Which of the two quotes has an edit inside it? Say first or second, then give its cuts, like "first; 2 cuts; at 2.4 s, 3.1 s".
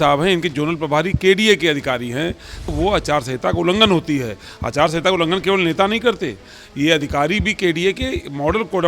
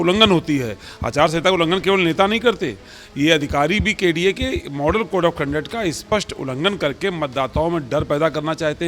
first; 1 cut; at 2.7 s